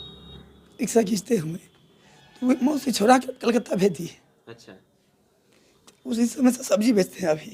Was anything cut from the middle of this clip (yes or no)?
no